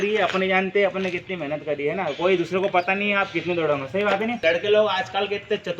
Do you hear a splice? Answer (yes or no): yes